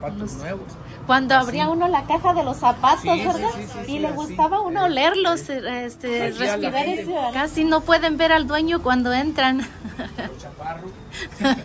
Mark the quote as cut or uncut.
cut